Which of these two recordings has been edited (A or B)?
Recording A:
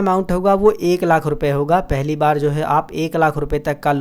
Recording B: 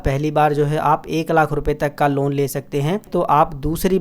B